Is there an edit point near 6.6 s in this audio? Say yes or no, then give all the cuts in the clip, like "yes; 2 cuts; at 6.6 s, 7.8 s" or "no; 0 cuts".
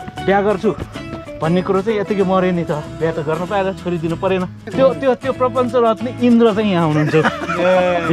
no; 1 cut; at 4.6 s